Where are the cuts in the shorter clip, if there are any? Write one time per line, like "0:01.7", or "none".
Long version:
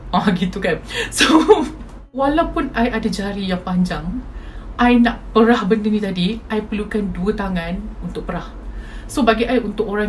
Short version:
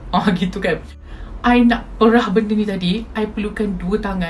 0:01.0